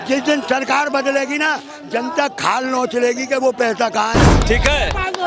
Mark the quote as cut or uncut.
cut